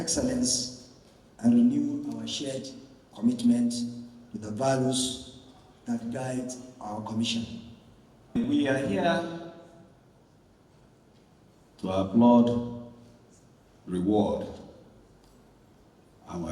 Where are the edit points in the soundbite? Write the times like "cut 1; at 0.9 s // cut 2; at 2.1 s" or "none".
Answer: cut 1; at 8.5 s